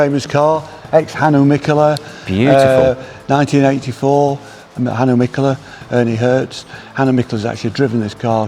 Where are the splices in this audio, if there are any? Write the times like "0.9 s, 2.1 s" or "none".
4.8 s